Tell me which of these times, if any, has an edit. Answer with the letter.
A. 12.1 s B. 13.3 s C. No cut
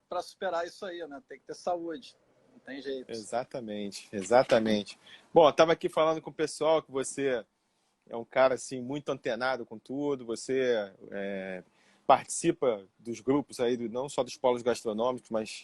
B